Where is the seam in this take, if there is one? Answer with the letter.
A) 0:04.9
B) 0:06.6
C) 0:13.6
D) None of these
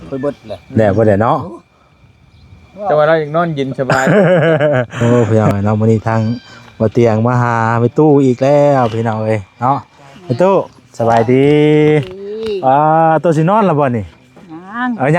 A